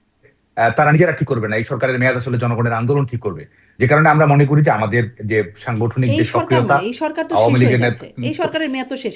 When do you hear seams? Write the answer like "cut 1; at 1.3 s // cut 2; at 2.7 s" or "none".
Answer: none